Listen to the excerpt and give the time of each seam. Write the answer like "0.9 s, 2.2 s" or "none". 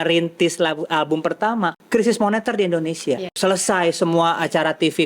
1.8 s, 3.4 s

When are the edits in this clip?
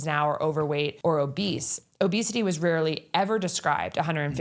0.9 s

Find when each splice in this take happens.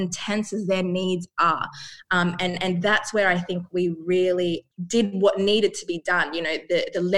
4.7 s

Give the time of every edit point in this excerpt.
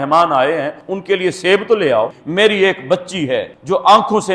2.2 s

